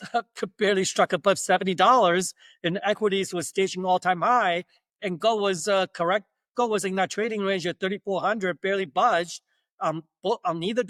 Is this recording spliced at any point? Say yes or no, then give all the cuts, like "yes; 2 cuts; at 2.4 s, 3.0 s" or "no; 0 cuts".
no; 0 cuts